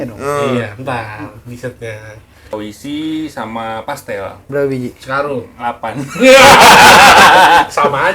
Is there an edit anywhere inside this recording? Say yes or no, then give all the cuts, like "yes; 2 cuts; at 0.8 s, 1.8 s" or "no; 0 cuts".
yes; 1 cut; at 2.5 s